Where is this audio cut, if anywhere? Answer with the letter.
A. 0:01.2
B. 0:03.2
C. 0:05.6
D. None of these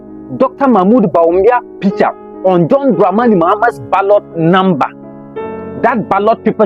D